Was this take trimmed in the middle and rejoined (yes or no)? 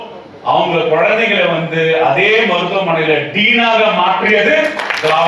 no